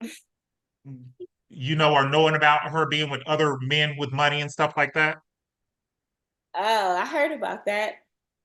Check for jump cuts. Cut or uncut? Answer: uncut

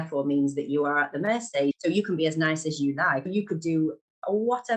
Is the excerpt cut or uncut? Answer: cut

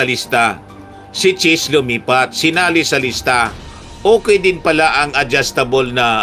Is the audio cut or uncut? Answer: uncut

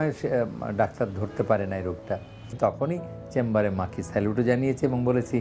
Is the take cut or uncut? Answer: cut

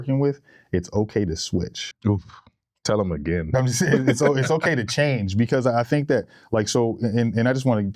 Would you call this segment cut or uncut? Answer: uncut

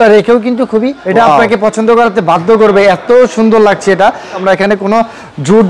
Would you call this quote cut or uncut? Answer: cut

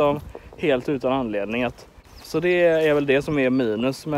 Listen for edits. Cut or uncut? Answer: cut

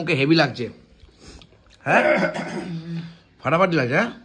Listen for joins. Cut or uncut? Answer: uncut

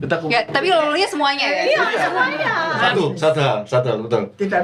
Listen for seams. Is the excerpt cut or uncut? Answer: cut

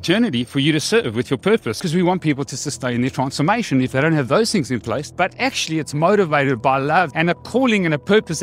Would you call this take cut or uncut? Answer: cut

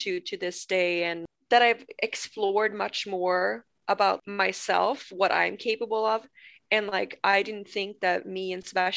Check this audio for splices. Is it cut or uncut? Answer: cut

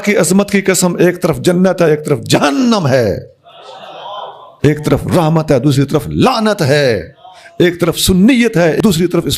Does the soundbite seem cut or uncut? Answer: cut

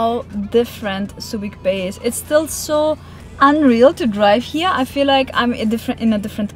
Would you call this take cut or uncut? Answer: uncut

